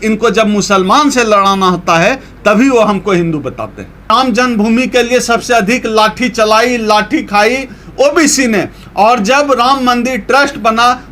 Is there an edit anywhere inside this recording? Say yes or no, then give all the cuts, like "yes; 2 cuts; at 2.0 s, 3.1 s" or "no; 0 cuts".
yes; 1 cut; at 4.1 s